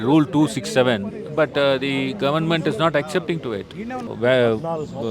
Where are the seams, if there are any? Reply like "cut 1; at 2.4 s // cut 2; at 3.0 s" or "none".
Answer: cut 1; at 4.1 s